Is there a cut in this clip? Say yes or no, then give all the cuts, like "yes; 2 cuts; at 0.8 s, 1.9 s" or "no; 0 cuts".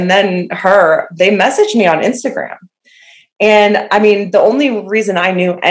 no; 0 cuts